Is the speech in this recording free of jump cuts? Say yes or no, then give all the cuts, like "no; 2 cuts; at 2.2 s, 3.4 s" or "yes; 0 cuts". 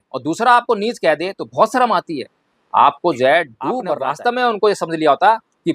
no; 1 cut; at 3.9 s